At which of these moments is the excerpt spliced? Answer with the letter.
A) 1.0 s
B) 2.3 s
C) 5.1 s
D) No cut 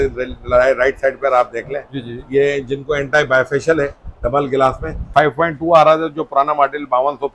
C